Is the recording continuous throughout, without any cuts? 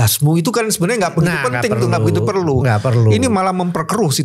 yes; 0 cuts

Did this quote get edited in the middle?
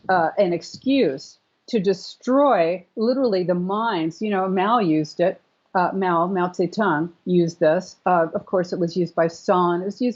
no; 0 cuts

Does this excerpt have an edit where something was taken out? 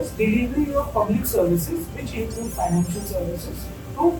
no; 0 cuts

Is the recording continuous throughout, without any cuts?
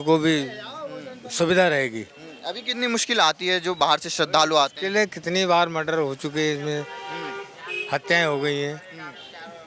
yes; 0 cuts

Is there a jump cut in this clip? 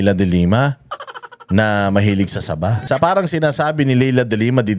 yes; 1 cut; at 2.8 s

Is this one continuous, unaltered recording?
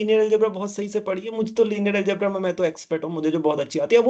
yes; 0 cuts

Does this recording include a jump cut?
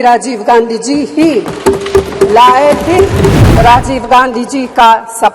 yes; 1 cut; at 3.4 s

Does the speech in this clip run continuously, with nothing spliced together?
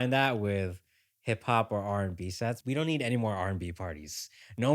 no; 1 cut; at 2.6 s

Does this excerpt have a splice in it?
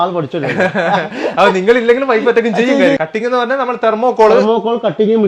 yes; 1 cut; at 3.0 s

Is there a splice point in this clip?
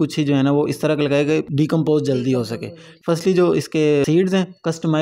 yes; 3 cuts; at 1.5 s, 2.9 s, 4.0 s

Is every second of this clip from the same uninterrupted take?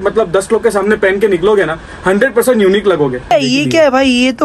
no; 1 cut; at 3.3 s

